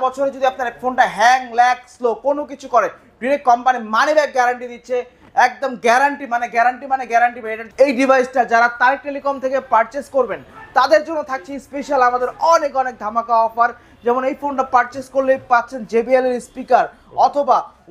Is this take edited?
yes; 1 cut; at 7.6 s

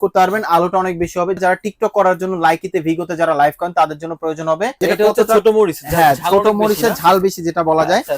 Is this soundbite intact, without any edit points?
no; 2 cuts; at 1.4 s, 4.7 s

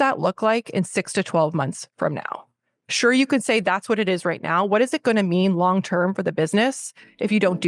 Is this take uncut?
yes; 0 cuts

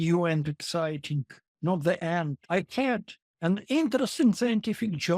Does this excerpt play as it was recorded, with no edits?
no; 1 cut; at 2.4 s

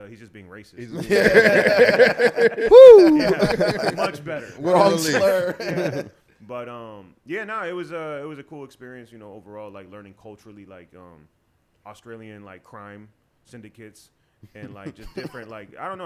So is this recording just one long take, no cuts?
yes; 0 cuts

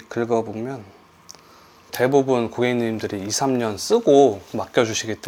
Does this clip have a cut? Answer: no; 0 cuts

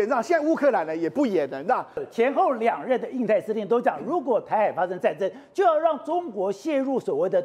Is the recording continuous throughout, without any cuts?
no; 1 cut; at 2.0 s

